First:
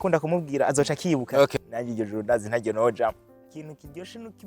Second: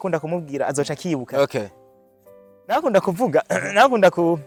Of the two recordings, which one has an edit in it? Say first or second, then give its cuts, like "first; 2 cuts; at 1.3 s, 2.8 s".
first; 2 cuts; at 1.5 s, 3.3 s